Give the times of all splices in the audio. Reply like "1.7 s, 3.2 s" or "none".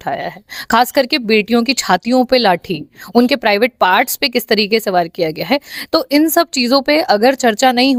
none